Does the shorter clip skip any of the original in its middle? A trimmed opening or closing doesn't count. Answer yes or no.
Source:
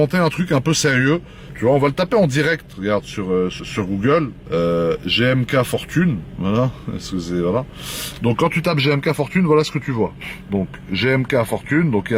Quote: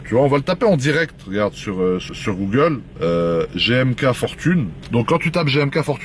yes